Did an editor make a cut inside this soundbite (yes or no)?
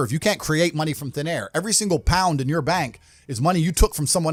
no